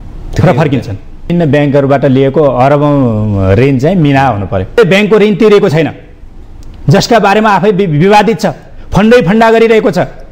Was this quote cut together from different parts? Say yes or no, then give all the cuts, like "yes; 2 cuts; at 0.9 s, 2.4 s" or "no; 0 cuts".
yes; 2 cuts; at 1.3 s, 4.8 s